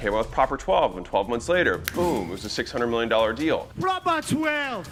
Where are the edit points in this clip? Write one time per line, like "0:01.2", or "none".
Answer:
none